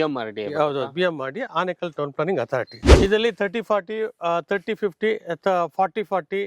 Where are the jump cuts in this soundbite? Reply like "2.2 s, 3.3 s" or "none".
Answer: 2.8 s